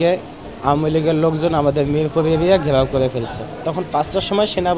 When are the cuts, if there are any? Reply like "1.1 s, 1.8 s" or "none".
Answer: 3.5 s